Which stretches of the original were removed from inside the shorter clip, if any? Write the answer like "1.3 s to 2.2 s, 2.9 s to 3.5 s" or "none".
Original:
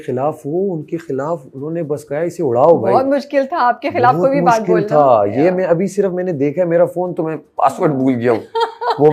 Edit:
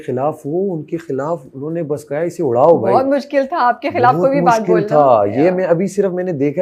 none